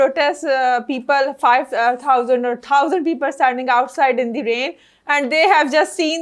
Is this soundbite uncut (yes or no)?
yes